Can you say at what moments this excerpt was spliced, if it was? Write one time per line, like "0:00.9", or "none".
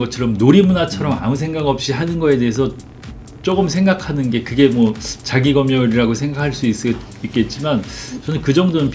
none